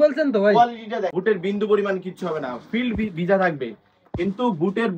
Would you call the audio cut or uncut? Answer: cut